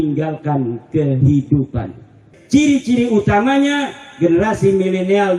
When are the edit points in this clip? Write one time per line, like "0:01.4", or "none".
0:02.2